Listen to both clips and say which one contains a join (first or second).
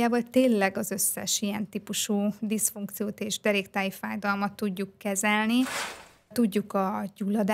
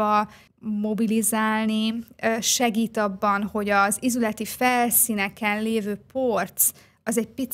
first